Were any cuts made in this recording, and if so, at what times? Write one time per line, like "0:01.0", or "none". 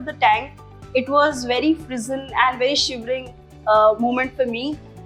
none